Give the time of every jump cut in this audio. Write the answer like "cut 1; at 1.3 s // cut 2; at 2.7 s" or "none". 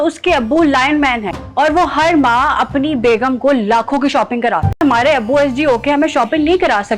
cut 1; at 1.4 s // cut 2; at 4.8 s